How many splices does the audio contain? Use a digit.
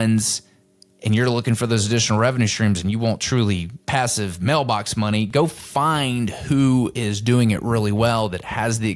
1